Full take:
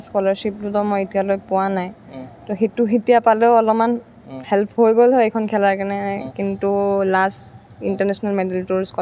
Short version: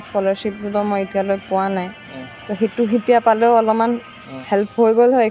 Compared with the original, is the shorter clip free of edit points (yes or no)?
yes